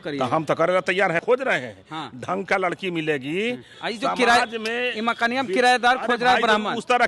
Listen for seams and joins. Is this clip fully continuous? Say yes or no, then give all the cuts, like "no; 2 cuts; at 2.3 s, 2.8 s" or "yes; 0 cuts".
no; 2 cuts; at 1.2 s, 3.7 s